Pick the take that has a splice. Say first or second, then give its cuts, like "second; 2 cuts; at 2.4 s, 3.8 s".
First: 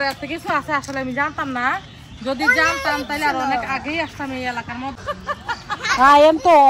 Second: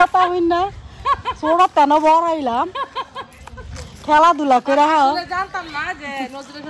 first; 1 cut; at 5.0 s